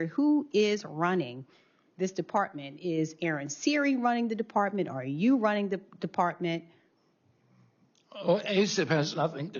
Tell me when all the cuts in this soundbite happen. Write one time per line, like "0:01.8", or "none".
none